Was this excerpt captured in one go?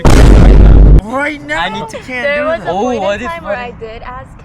no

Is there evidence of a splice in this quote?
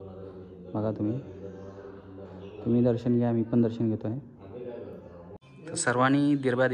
yes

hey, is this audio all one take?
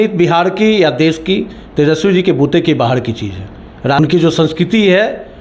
no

